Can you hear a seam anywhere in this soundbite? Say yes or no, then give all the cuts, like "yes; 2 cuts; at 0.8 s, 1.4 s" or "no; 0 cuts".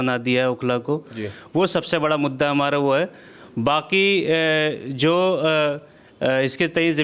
no; 0 cuts